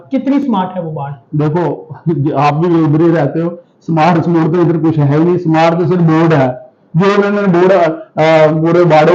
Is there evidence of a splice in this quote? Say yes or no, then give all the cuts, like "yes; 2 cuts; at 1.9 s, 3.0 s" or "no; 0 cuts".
no; 0 cuts